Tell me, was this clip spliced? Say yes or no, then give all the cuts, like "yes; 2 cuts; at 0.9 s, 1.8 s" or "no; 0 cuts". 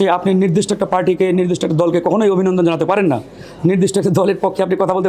no; 0 cuts